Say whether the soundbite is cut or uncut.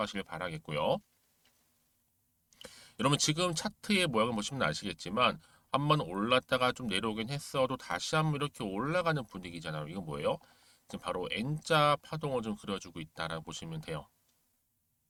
uncut